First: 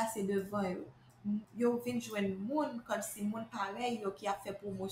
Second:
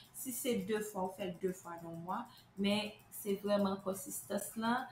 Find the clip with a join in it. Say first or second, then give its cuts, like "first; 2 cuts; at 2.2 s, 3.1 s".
first; 1 cut; at 1.5 s